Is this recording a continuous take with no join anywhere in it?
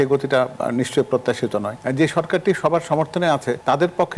no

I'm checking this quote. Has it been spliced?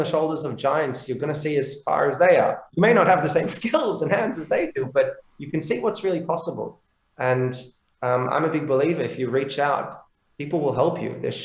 no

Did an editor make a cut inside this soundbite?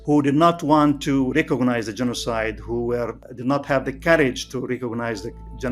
yes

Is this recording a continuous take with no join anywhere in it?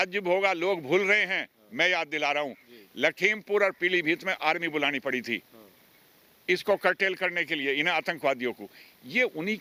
yes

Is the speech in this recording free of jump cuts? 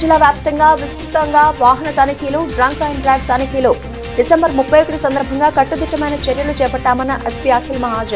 yes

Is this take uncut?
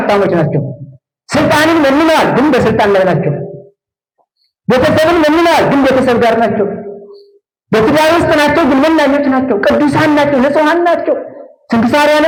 yes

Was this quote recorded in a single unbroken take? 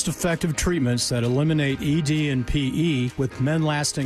yes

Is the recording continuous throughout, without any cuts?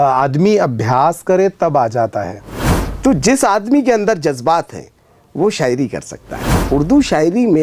no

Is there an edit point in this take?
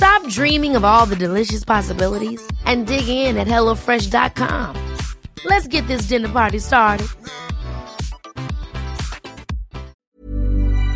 yes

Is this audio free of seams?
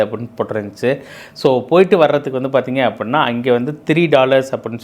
yes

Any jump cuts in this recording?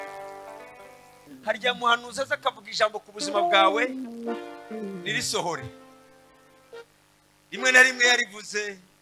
yes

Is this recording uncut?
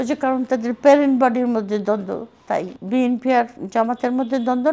no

